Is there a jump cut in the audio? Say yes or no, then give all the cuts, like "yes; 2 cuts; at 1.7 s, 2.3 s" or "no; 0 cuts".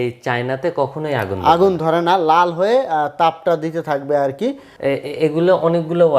yes; 1 cut; at 4.7 s